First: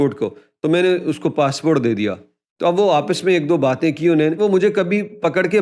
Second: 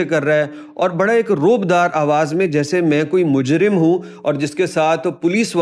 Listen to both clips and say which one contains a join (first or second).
first